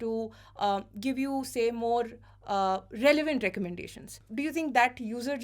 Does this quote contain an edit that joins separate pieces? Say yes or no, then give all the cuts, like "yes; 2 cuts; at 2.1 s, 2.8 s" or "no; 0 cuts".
yes; 1 cut; at 4.2 s